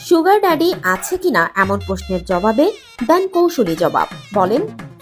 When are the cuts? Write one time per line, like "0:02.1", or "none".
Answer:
none